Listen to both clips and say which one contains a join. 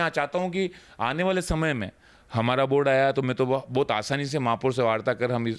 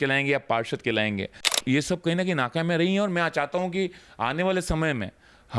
second; 1 cut; at 1.5 s

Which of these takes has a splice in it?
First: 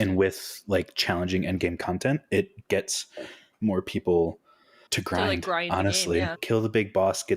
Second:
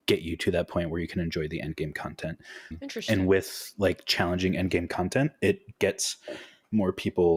first; 1 cut; at 6.4 s

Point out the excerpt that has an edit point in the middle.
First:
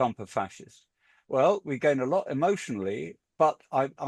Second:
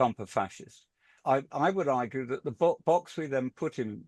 second; 1 cut; at 1.2 s

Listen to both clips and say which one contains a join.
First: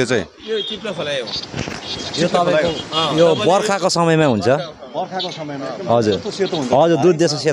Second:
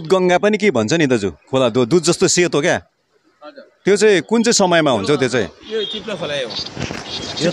second; 1 cut; at 1.4 s

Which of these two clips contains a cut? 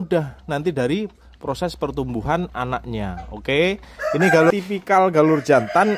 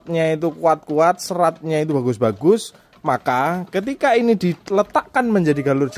first; 1 cut; at 4.5 s

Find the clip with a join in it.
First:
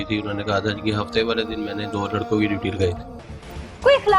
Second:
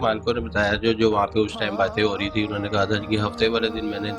first; 1 cut; at 3.1 s

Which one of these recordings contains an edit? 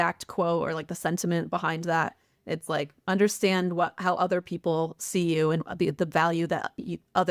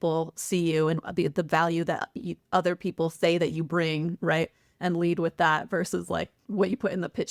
second; 1 cut; at 6.4 s

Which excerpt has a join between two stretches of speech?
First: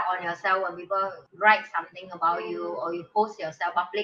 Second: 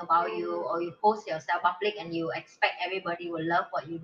first; 1 cut; at 1.2 s

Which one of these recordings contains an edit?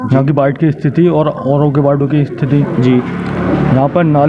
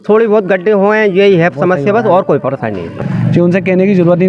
second; 1 cut; at 3.0 s

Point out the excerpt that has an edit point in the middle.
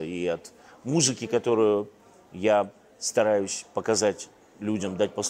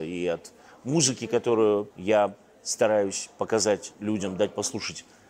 second; 2 cuts; at 1.9 s, 3.9 s

